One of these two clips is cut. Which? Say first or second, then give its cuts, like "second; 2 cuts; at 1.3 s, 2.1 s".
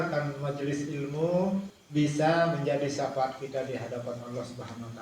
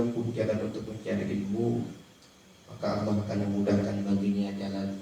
first; 1 cut; at 1.8 s